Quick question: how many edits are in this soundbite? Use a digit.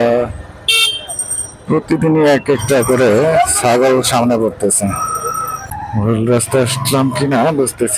1